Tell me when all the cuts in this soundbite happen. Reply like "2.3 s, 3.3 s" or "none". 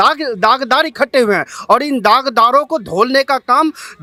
none